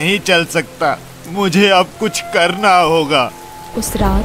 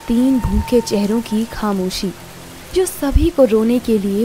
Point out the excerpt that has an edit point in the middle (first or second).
first